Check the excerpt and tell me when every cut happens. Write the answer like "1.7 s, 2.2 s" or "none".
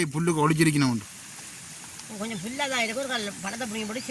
none